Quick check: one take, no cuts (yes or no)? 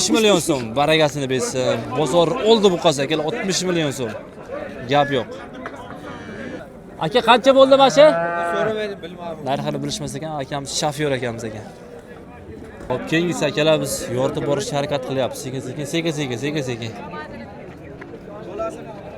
yes